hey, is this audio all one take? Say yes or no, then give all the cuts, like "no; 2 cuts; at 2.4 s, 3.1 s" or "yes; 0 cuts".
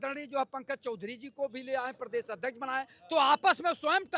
yes; 0 cuts